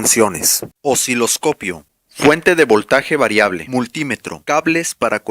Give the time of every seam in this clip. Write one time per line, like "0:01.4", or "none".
0:04.4